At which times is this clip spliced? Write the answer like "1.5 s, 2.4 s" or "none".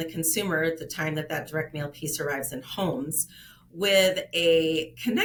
none